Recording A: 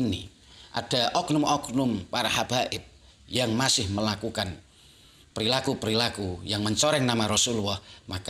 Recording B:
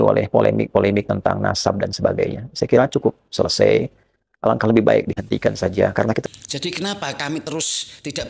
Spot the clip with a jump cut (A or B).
B